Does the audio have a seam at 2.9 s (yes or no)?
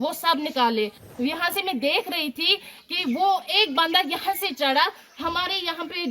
no